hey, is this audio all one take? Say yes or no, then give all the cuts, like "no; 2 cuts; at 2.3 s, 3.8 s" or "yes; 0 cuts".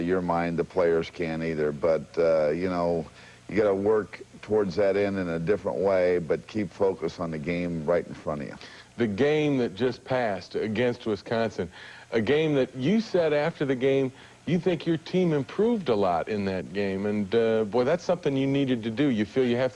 yes; 0 cuts